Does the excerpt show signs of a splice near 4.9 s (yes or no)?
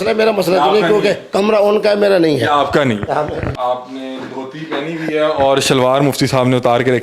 no